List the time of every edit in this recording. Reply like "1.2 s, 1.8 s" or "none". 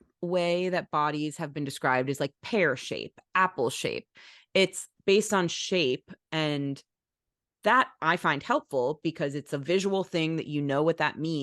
none